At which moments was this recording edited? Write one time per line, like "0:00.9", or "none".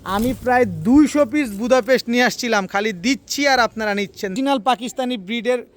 0:04.3